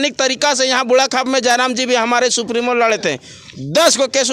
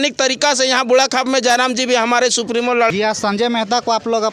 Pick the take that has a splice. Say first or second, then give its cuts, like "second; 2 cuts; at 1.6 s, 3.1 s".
second; 1 cut; at 2.9 s